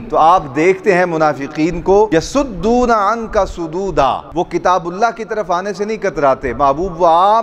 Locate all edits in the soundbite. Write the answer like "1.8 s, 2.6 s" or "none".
2.1 s

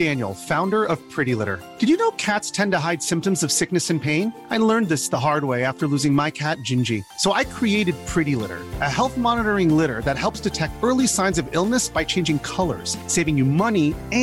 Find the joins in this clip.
none

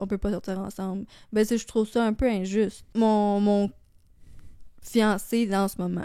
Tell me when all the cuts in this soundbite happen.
2.8 s

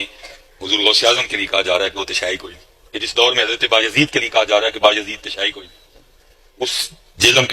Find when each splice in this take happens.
none

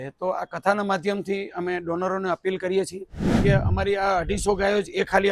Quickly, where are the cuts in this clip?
3.4 s

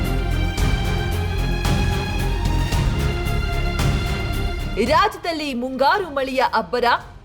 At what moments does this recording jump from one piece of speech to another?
2.9 s

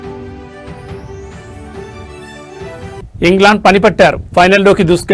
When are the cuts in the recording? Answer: none

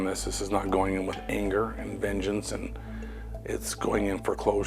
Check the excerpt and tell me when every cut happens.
none

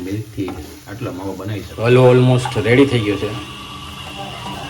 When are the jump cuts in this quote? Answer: 1.7 s

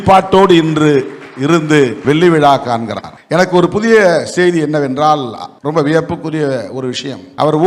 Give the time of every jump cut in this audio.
none

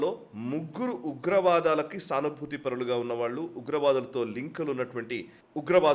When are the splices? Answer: none

